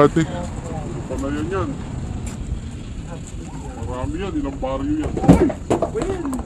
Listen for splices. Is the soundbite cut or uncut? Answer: uncut